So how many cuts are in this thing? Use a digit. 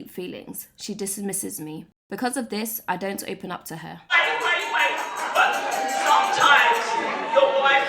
2